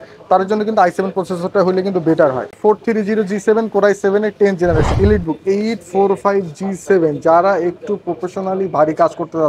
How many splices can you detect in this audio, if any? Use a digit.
2